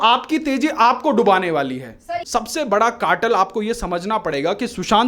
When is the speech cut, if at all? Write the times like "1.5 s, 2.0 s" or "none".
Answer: 2.2 s